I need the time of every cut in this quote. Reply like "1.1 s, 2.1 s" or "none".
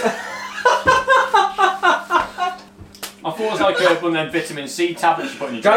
2.5 s